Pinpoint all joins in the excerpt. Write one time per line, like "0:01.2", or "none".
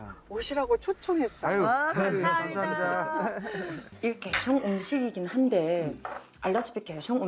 0:03.9